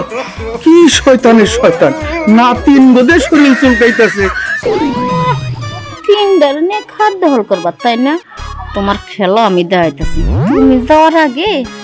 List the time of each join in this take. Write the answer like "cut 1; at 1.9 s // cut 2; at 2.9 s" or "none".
cut 1; at 4.5 s